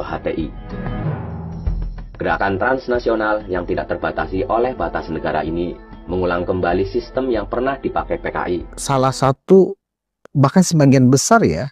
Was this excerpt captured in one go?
no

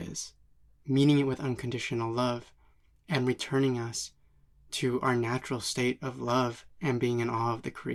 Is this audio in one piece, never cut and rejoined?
yes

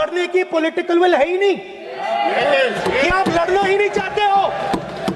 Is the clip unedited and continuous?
yes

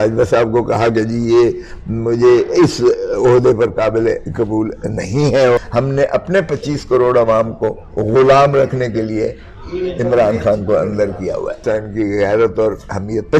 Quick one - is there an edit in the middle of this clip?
yes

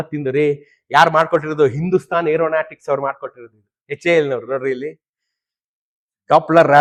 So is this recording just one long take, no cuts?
yes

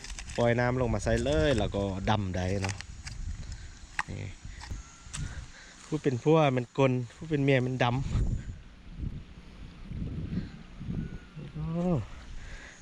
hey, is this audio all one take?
no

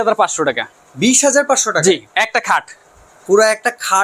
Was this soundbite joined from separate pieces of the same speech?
no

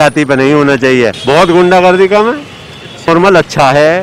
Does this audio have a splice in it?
yes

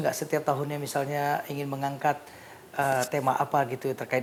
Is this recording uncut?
yes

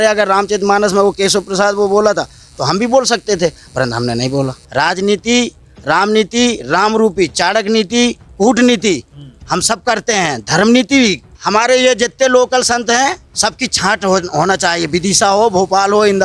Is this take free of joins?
no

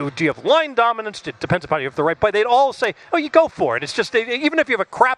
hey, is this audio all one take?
yes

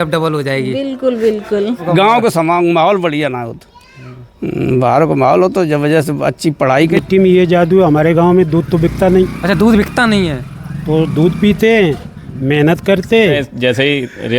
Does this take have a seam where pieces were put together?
yes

